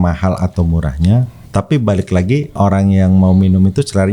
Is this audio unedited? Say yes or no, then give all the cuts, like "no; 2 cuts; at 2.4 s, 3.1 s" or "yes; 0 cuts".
no; 2 cuts; at 1.4 s, 2.5 s